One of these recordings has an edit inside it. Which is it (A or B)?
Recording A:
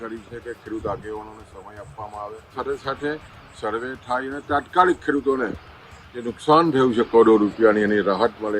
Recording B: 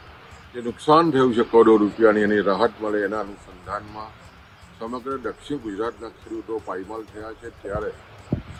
A